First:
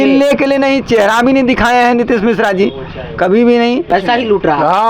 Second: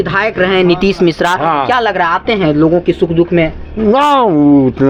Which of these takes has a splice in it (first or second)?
first